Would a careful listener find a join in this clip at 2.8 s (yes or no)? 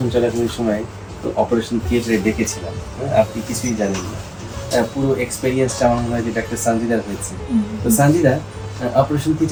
no